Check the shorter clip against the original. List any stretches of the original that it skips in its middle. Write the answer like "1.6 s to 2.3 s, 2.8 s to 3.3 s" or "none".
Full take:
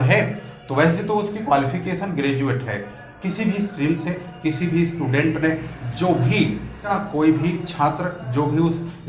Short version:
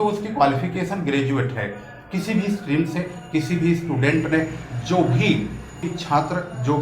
6.9 s to 7.5 s